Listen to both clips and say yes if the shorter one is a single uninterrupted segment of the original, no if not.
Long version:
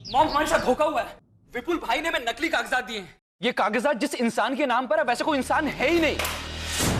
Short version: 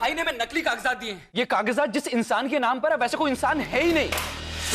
no